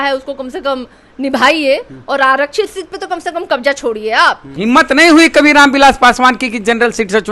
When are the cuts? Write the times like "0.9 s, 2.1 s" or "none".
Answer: 4.5 s